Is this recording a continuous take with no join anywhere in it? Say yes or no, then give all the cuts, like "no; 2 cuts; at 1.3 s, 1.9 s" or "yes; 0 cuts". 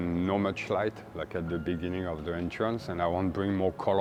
yes; 0 cuts